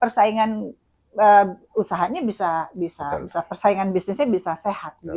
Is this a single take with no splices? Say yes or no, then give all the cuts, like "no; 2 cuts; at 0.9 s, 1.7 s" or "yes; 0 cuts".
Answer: yes; 0 cuts